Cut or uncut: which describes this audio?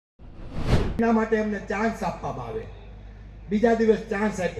cut